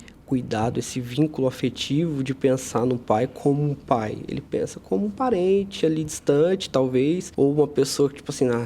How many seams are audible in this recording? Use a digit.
1